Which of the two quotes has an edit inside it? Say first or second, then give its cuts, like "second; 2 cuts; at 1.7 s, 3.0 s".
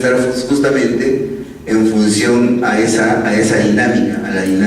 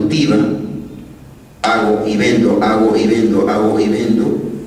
first; 1 cut; at 1.6 s